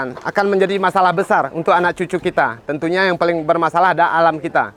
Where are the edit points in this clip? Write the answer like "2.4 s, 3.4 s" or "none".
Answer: none